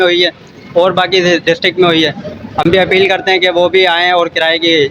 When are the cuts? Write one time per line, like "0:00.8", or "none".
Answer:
none